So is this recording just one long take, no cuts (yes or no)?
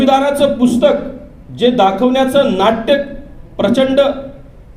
yes